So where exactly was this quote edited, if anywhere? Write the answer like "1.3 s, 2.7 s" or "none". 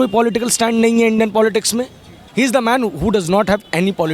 2.2 s